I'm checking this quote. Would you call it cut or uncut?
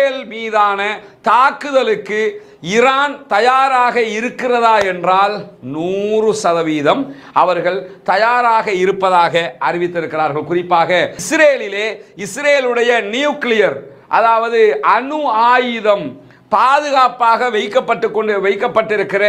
cut